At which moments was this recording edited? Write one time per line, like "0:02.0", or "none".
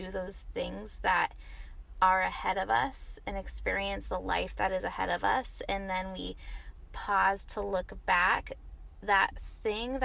none